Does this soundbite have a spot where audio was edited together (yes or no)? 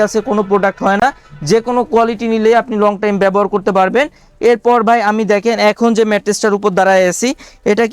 no